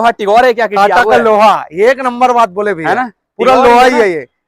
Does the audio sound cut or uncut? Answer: uncut